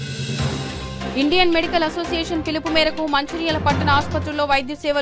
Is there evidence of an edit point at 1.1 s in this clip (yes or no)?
yes